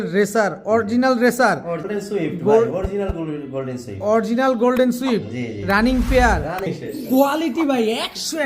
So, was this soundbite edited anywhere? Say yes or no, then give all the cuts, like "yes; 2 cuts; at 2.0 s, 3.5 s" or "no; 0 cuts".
yes; 2 cuts; at 1.9 s, 6.7 s